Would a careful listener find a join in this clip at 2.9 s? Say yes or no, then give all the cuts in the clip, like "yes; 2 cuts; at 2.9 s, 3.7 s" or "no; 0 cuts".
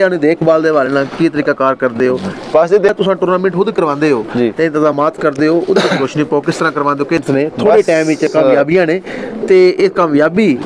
yes; 2 cuts; at 2.9 s, 7.2 s